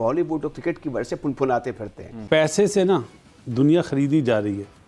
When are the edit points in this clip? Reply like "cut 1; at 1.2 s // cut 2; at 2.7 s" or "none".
cut 1; at 2.4 s